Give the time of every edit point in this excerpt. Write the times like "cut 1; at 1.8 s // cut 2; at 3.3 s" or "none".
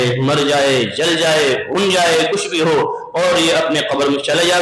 none